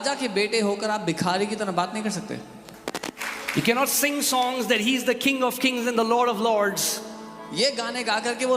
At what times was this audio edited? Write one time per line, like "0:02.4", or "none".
0:03.2